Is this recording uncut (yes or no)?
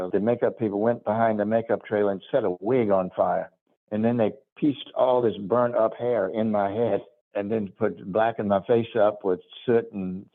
yes